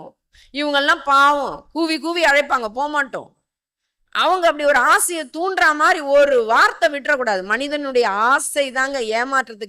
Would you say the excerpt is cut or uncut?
uncut